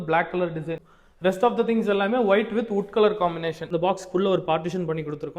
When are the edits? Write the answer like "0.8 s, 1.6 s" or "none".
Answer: 0.8 s, 3.6 s